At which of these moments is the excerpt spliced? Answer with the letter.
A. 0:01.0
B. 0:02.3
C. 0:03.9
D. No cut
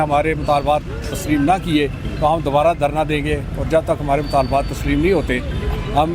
D